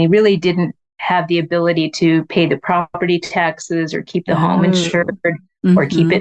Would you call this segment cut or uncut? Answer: uncut